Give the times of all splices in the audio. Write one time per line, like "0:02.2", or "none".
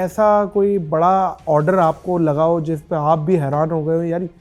none